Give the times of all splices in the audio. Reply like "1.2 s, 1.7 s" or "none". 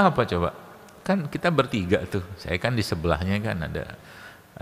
none